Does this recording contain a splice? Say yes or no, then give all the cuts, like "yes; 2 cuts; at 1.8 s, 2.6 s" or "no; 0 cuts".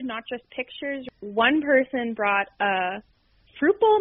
yes; 1 cut; at 1.1 s